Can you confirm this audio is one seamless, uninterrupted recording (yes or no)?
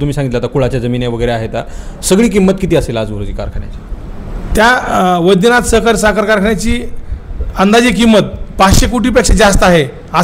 yes